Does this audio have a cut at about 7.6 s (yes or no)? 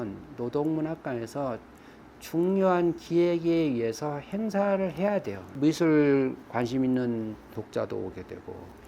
no